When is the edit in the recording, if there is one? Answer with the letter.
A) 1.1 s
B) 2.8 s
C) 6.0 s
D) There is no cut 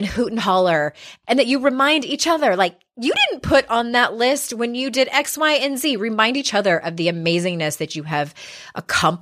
A